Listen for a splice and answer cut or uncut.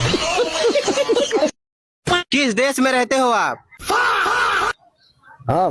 cut